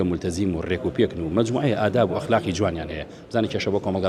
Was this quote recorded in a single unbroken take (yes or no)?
yes